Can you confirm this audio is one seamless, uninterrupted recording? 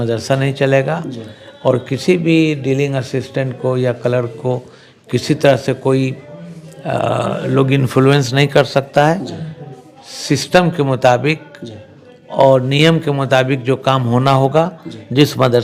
yes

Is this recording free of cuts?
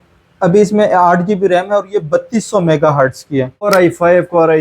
no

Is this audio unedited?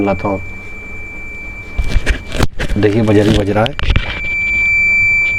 yes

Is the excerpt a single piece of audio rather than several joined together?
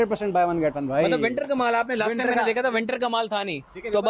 yes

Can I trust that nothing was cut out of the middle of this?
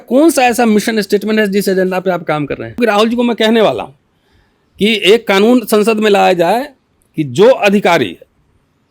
no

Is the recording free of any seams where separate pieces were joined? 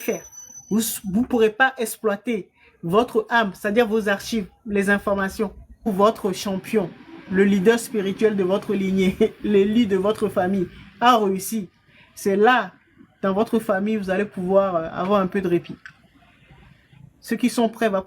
no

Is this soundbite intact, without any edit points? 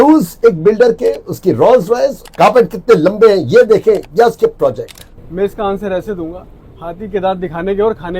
no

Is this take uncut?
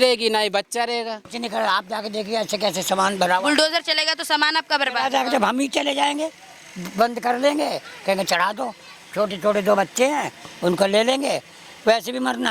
no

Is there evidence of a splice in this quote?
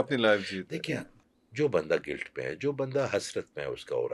yes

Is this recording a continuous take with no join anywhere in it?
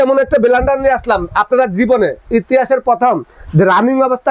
yes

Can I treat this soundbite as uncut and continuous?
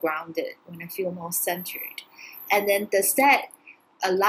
yes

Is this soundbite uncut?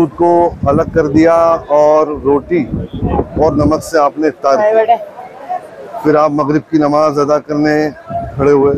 yes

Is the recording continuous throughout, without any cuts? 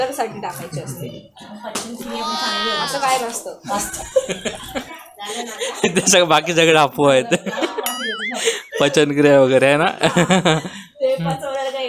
yes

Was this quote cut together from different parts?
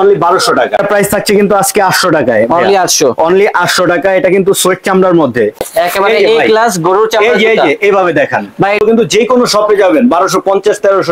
yes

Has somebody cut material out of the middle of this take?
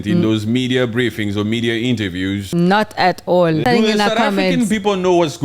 yes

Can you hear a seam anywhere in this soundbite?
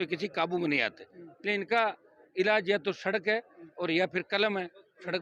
no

